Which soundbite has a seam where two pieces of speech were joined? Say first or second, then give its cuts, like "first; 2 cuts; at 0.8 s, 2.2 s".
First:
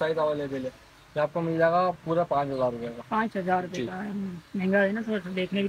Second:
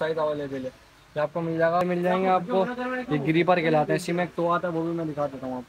second; 1 cut; at 1.8 s